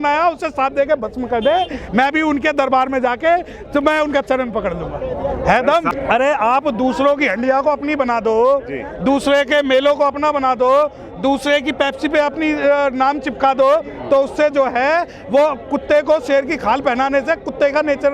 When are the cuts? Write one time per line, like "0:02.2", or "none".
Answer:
0:05.9